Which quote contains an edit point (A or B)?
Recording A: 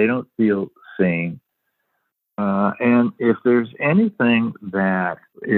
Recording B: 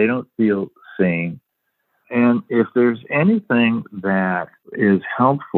B